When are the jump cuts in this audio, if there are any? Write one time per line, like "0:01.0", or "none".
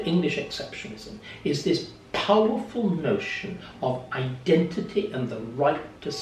none